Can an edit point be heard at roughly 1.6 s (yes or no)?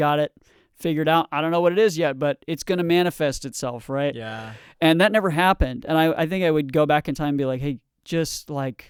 no